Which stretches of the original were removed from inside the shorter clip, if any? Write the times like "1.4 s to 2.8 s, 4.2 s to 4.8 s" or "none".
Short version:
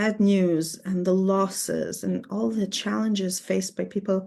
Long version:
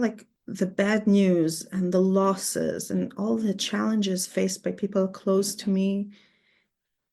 none